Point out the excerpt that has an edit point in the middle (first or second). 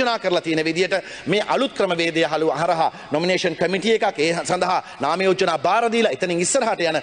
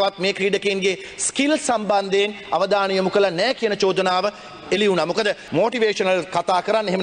second